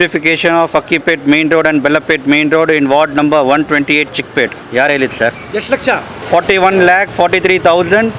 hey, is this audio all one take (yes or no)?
yes